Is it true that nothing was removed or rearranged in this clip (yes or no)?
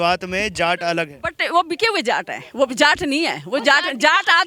yes